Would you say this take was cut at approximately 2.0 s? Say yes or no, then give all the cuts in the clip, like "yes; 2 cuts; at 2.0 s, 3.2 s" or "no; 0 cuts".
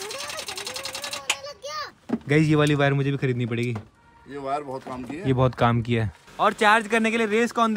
yes; 2 cuts; at 2.0 s, 6.3 s